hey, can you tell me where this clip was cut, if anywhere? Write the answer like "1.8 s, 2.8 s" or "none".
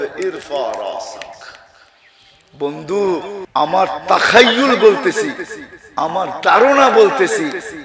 3.4 s